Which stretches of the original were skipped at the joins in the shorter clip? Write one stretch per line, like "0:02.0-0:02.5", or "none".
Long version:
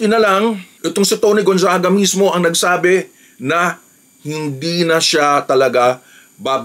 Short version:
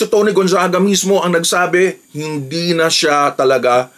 0:03.2-0:04.2